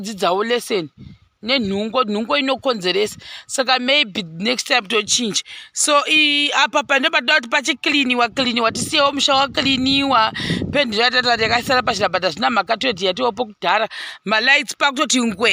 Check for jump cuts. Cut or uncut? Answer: uncut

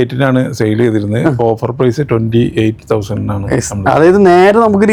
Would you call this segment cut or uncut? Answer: uncut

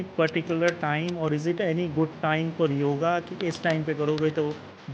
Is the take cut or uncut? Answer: uncut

